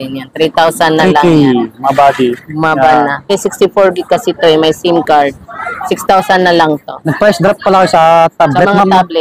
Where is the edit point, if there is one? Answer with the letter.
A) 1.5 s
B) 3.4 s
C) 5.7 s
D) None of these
B